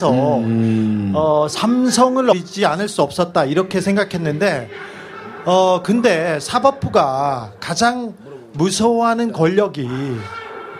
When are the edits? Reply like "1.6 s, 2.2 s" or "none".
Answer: none